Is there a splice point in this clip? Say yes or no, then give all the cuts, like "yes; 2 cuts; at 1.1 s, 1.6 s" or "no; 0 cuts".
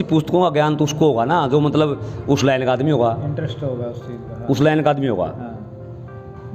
no; 0 cuts